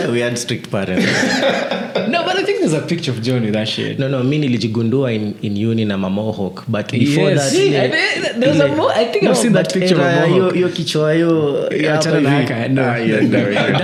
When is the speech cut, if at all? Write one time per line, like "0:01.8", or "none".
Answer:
none